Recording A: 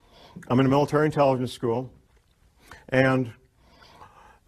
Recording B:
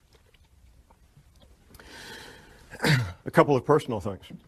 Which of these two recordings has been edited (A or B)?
B